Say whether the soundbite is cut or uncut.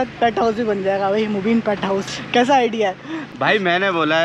cut